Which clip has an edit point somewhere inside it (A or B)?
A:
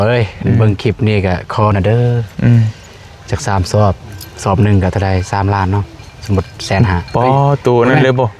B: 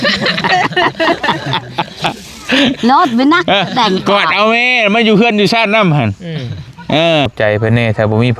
B